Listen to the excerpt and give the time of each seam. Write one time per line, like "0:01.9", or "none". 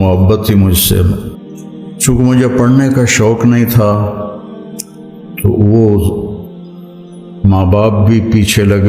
0:01.9